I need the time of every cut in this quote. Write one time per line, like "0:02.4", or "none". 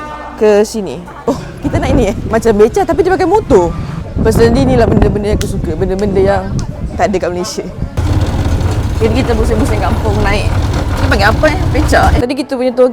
0:01.1
0:02.2
0:04.0
0:07.8
0:12.2